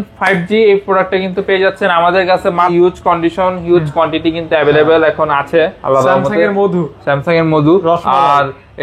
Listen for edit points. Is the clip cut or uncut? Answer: cut